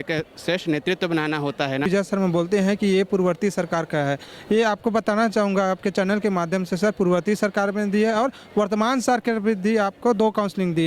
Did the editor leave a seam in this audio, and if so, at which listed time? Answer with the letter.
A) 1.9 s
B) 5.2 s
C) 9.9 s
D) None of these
A